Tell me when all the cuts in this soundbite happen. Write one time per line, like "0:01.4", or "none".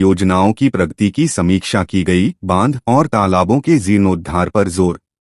none